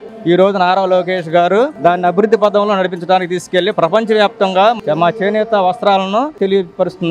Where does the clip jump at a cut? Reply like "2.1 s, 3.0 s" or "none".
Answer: 4.8 s, 6.3 s